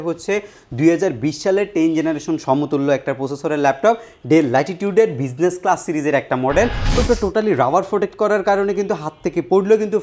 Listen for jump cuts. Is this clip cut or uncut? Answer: cut